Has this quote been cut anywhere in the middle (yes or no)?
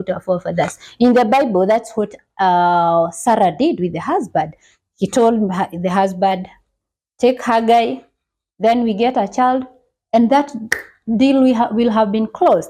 no